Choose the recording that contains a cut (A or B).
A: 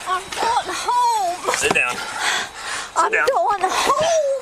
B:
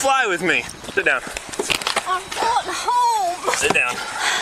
B